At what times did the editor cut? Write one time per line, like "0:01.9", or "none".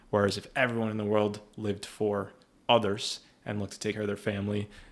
0:04.0